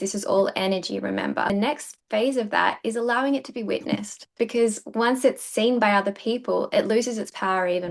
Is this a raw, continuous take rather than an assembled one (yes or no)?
no